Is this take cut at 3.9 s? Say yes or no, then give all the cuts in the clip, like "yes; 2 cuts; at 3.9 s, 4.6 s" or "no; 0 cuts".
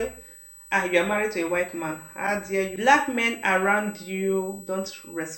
no; 1 cut; at 2.2 s